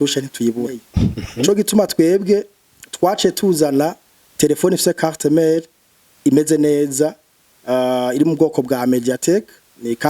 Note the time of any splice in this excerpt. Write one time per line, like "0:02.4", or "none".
0:01.2